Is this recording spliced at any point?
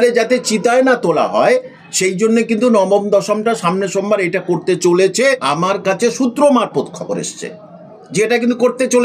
yes; 1 cut; at 5.4 s

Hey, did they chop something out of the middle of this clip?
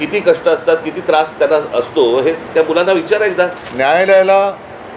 yes; 1 cut; at 3.6 s

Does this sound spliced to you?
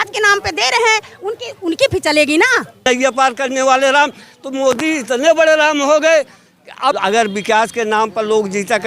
yes; 2 cuts; at 2.8 s, 7.0 s

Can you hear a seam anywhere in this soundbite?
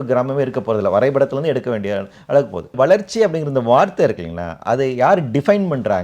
yes; 1 cut; at 2.8 s

